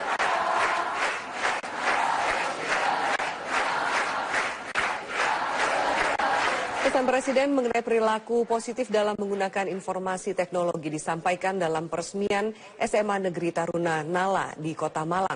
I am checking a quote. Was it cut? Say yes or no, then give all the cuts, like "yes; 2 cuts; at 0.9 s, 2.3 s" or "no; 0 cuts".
yes; 1 cut; at 8.9 s